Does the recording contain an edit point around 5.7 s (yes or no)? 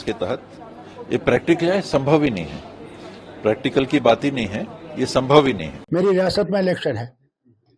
yes